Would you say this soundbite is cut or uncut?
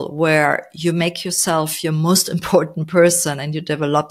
uncut